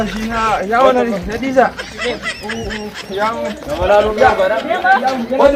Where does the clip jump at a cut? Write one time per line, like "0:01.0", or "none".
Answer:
none